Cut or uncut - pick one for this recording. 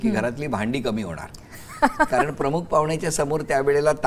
uncut